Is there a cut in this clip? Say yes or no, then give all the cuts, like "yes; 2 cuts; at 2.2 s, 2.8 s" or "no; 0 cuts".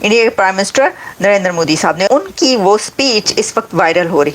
yes; 1 cut; at 2.1 s